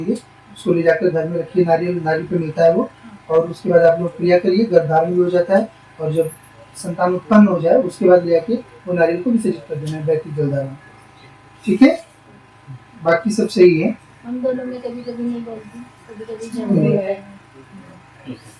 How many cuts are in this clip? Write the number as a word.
one